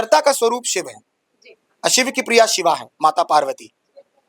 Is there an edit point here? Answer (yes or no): no